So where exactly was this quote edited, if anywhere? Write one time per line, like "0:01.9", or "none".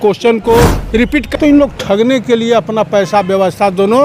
0:01.3